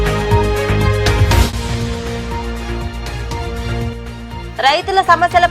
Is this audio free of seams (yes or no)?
no